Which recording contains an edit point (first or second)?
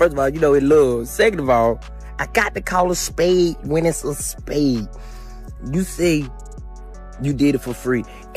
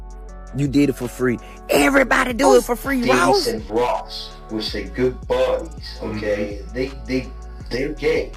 second